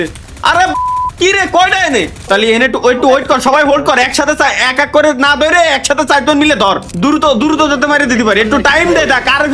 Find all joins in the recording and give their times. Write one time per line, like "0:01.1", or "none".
0:02.2
0:06.9

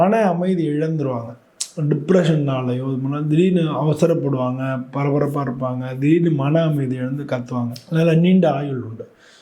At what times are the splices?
0:07.8

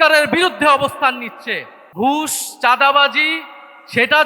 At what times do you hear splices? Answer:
0:01.9

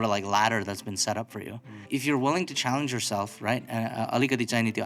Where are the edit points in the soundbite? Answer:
0:01.8

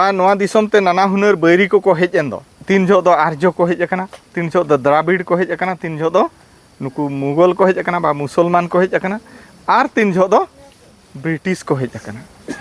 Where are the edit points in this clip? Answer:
0:02.5

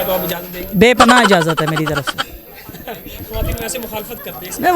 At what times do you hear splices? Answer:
none

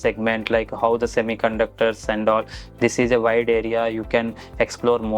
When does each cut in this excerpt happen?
none

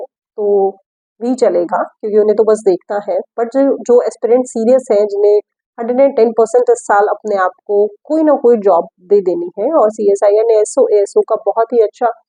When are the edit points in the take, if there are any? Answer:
none

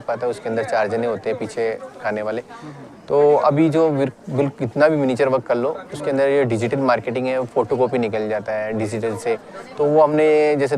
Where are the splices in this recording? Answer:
none

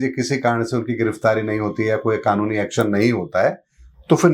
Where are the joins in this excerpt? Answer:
none

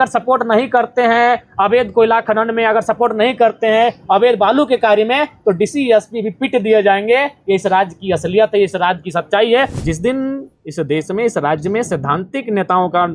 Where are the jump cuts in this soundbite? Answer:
0:09.8

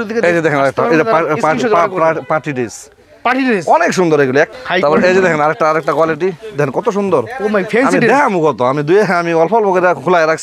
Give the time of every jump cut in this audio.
0:04.5

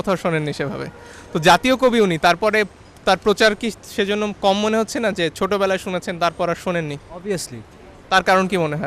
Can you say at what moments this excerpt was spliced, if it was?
none

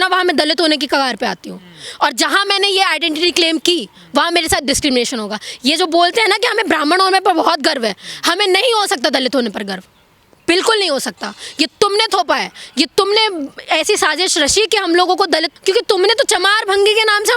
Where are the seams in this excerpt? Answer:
0:15.5

